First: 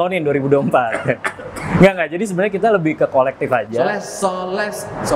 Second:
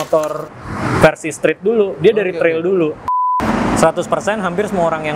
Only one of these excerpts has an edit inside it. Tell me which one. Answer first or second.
second